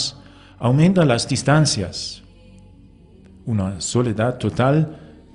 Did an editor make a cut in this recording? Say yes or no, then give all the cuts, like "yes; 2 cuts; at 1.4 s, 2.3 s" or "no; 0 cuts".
yes; 1 cut; at 1.9 s